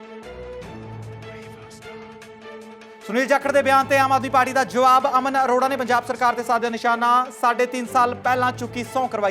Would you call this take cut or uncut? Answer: cut